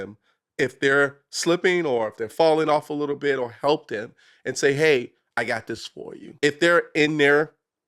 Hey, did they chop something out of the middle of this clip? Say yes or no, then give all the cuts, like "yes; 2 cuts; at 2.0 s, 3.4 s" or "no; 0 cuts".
yes; 1 cut; at 6.2 s